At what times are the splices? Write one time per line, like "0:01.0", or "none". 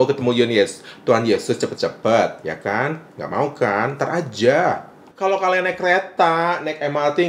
0:05.1